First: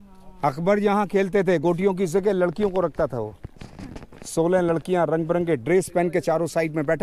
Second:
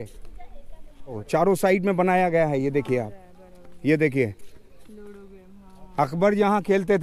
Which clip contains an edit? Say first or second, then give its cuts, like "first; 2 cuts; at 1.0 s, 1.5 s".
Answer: second; 1 cut; at 1.2 s